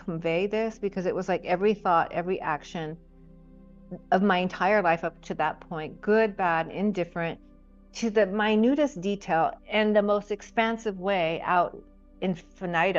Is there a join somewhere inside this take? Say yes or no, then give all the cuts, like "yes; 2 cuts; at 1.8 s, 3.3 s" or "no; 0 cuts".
no; 0 cuts